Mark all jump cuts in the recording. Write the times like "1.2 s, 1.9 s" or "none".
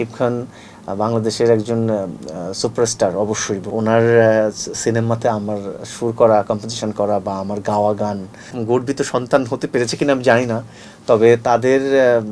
3.7 s, 8.6 s